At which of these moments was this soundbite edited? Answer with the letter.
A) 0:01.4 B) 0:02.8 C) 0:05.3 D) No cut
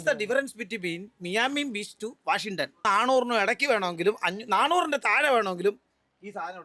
B